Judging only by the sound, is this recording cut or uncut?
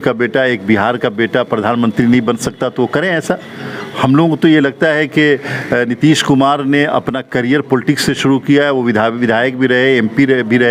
uncut